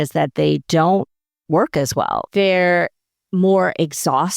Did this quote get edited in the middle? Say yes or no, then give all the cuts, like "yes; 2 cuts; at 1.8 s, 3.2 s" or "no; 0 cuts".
yes; 1 cut; at 2.2 s